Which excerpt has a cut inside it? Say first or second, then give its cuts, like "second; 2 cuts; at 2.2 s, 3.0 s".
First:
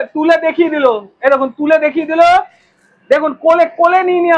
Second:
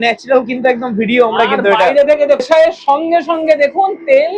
second; 1 cut; at 2.4 s